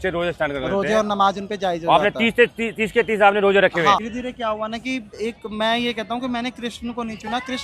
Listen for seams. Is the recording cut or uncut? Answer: cut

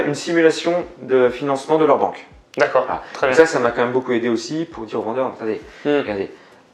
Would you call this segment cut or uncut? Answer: uncut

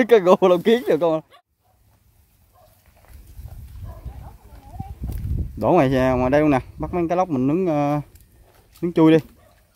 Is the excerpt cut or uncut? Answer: cut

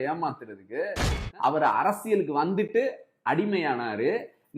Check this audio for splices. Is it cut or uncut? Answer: cut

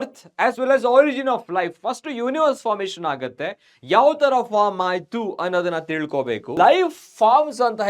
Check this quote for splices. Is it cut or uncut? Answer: cut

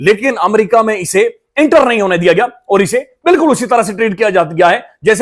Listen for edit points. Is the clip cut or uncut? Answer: uncut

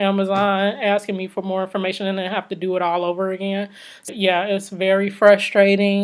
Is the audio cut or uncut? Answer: cut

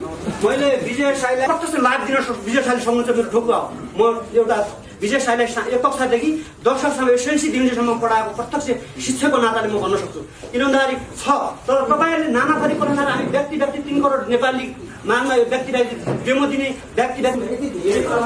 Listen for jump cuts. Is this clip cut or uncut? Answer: cut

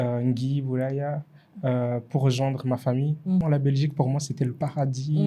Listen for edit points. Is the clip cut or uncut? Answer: cut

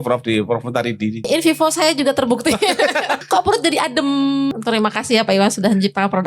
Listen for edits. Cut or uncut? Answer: cut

